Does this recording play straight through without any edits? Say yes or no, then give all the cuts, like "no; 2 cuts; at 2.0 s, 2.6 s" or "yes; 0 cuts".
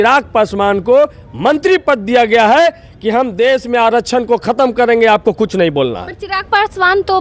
yes; 0 cuts